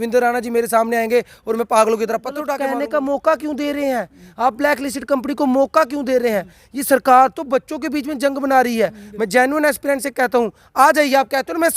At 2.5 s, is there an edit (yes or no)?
yes